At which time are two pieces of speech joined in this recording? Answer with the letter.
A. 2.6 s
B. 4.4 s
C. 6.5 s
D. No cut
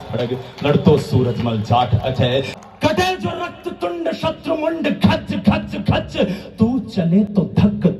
A